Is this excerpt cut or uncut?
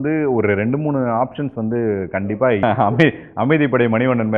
cut